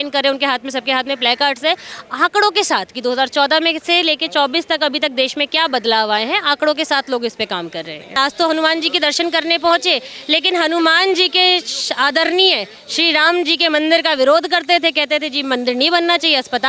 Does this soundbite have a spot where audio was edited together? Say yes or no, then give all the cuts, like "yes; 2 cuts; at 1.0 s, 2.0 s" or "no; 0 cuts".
yes; 1 cut; at 8.2 s